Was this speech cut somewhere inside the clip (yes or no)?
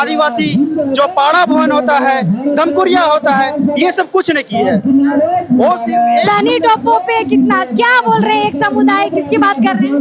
no